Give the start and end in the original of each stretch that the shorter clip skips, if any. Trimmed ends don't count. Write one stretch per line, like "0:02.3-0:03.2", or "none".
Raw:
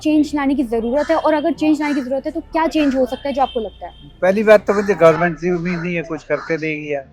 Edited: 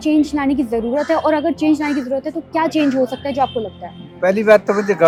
none